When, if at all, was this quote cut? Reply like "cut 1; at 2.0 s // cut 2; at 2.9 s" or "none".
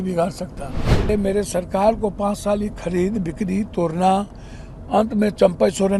cut 1; at 1.1 s